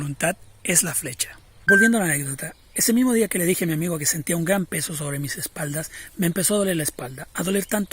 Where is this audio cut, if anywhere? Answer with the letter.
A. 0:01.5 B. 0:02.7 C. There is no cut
A